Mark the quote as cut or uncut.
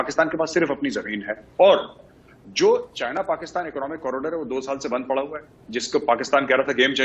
cut